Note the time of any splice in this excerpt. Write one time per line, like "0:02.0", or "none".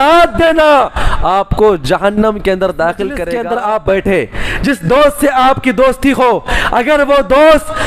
0:03.2